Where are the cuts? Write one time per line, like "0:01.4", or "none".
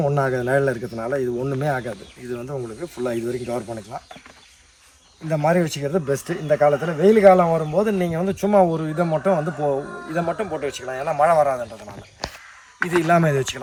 none